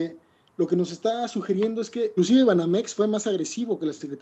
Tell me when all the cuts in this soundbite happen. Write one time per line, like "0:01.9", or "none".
none